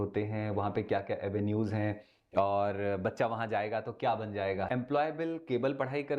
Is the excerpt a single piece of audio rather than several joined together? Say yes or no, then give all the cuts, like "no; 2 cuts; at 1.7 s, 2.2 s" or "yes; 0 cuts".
no; 1 cut; at 4.7 s